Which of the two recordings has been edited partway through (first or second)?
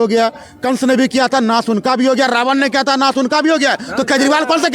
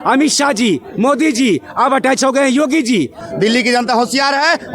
second